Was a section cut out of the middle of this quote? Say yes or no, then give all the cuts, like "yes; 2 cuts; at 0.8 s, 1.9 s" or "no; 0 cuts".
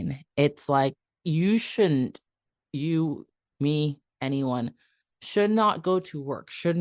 yes; 1 cut; at 1.1 s